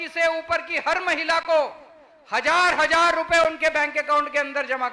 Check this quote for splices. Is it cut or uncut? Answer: uncut